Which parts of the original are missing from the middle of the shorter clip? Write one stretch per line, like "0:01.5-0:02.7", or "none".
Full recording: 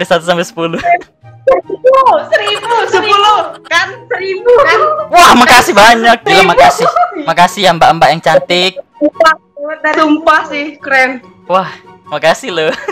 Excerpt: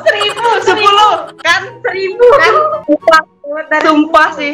0:05.0-0:08.9